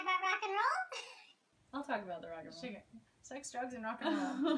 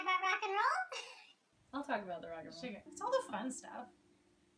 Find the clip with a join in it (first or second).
second